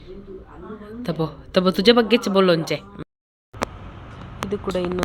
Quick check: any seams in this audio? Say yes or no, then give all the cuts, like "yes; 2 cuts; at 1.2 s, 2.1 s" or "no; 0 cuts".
yes; 1 cut; at 2.9 s